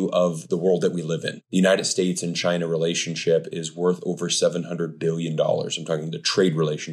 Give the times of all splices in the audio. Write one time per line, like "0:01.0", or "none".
0:01.4